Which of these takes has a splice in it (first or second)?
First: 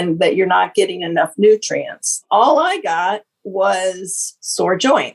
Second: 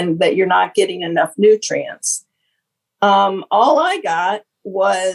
first